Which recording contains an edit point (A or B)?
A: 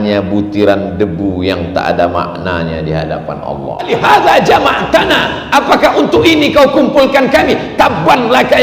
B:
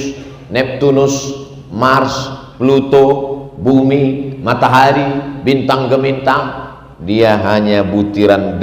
A